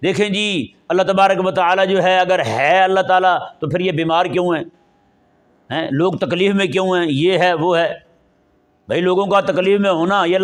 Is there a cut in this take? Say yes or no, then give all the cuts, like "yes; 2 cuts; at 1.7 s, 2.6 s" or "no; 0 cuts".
no; 0 cuts